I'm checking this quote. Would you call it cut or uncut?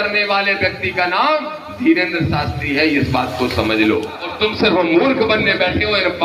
cut